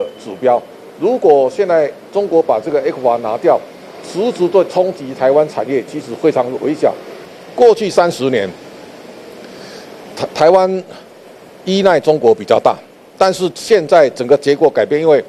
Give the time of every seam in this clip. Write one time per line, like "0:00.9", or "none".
0:07.1

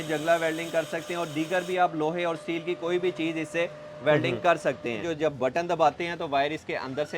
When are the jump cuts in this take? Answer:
0:05.1

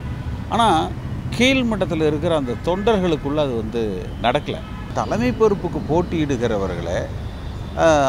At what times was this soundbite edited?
0:04.9

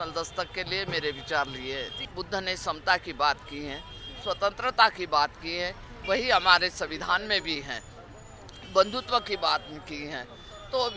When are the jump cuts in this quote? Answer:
0:02.0

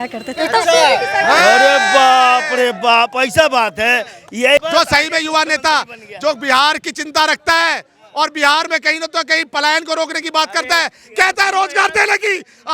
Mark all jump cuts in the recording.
0:04.6

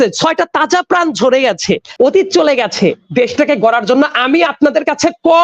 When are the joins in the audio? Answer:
0:01.9

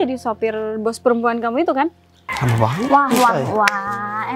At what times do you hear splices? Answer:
0:02.3

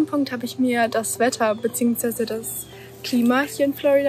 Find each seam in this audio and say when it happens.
none

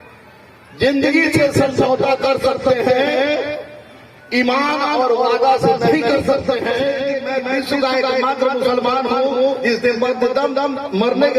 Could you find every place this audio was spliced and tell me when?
0:07.2

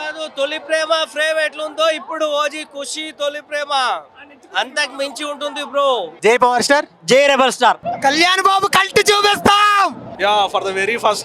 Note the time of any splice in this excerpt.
none

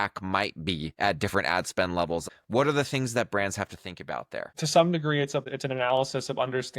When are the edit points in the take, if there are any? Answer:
0:00.9
0:02.2
0:04.5
0:05.5

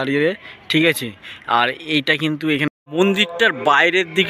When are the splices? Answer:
0:02.7

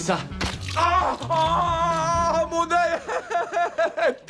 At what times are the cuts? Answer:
0:02.8

